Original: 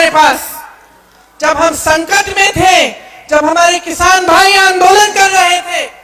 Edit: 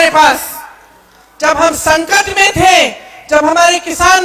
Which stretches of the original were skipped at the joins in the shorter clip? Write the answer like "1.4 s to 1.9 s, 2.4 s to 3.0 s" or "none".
none

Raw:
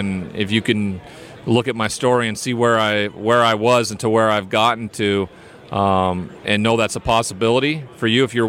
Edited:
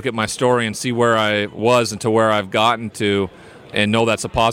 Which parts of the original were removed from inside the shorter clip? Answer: 3.2 s to 3.6 s, 5.6 s to 6.3 s

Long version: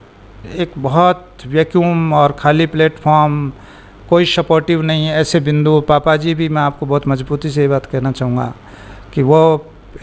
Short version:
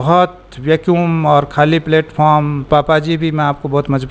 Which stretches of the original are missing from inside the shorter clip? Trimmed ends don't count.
3.5 s to 5.8 s

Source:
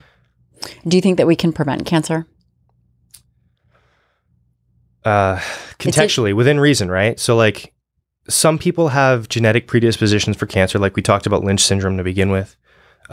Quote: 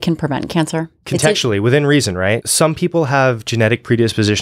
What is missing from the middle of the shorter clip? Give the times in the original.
2.3 s to 5.7 s, 7.2 s to 8.3 s

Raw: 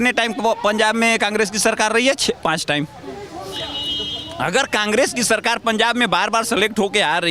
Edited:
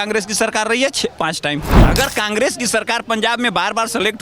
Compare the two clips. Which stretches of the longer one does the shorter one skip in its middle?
3.0 s to 4.3 s

